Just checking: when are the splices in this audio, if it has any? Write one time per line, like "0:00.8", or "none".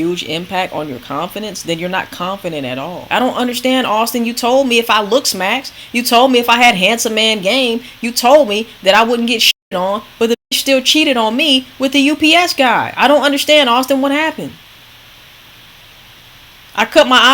0:03.0